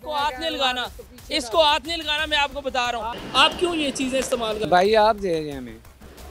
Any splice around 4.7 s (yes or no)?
no